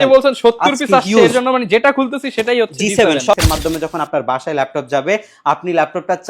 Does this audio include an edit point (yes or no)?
yes